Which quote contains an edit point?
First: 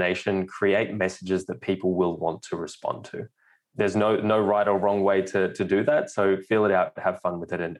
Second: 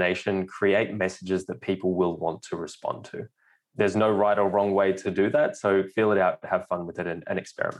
second; 2 cuts; at 4.0 s, 5.0 s

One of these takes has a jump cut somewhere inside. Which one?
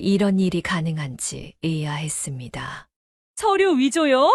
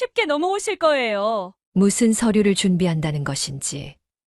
second; 1 cut; at 1.6 s

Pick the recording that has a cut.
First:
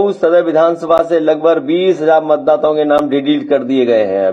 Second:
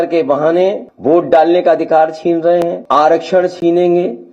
second; 2 cuts; at 0.9 s, 2.8 s

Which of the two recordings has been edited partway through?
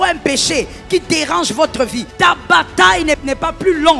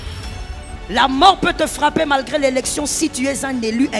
first; 2 cuts; at 2.0 s, 3.2 s

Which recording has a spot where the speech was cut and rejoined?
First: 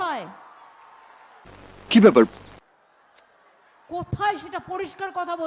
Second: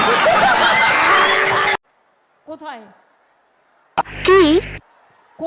second; 1 cut; at 1.7 s

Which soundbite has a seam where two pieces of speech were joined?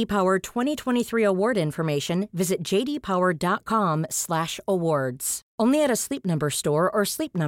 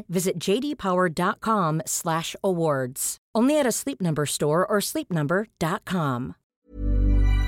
second; 1 cut; at 6.4 s

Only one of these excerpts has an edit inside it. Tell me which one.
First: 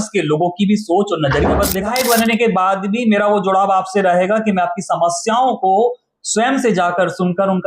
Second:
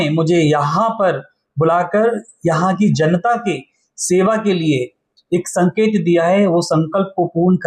first; 1 cut; at 1.8 s

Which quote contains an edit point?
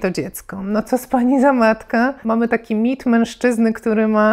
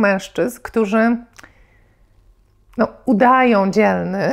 first; 1 cut; at 2.2 s

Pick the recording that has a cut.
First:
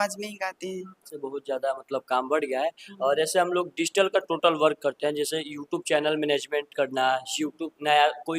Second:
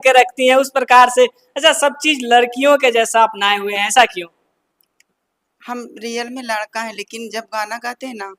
first; 1 cut; at 1.2 s

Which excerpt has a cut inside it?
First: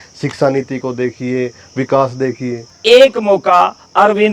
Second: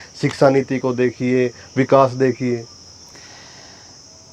first; 1 cut; at 2.7 s

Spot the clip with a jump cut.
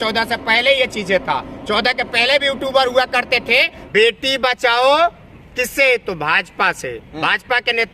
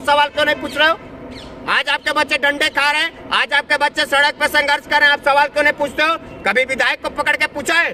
first; 1 cut; at 3.8 s

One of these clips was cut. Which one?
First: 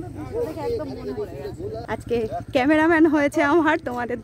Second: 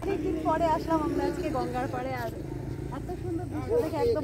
first; 1 cut; at 1.8 s

